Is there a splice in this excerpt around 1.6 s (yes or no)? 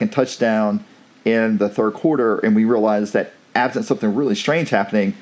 yes